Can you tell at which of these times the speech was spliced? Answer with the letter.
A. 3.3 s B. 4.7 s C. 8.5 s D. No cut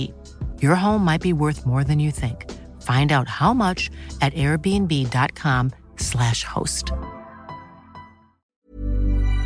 C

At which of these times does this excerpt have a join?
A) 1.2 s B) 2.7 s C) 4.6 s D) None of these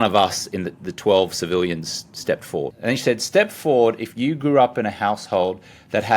B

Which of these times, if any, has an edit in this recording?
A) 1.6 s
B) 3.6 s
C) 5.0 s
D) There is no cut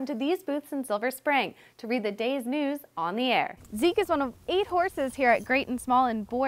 B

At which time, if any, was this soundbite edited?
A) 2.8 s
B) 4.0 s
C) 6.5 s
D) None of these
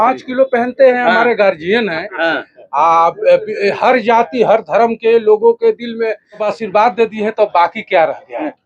C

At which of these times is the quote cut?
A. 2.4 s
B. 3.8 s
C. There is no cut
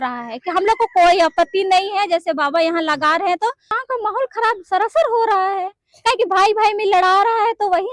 B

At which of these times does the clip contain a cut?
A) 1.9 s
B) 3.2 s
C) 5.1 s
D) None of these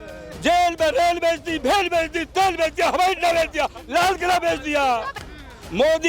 C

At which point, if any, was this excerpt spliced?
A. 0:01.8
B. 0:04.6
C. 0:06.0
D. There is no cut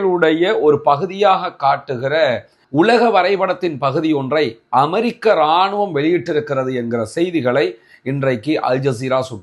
D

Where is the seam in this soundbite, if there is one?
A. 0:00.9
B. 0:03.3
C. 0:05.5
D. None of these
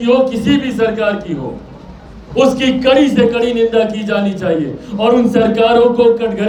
D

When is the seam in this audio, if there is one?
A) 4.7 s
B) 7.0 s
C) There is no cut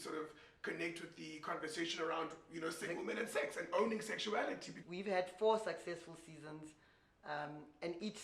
A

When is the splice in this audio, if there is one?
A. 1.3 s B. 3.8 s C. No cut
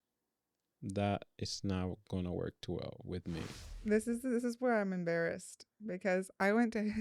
B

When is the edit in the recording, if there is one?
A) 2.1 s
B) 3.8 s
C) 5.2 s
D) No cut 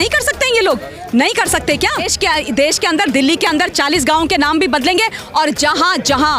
A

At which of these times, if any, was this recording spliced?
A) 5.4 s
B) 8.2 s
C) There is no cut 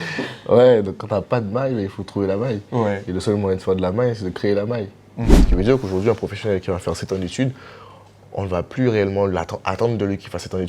A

